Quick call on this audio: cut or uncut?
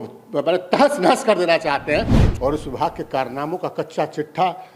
cut